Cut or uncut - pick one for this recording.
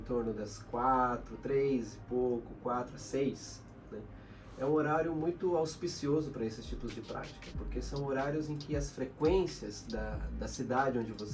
uncut